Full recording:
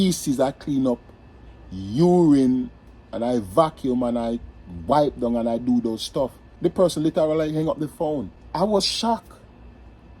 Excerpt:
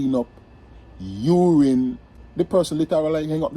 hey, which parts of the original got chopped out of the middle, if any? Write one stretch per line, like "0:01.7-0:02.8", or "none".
0:02.9-0:06.4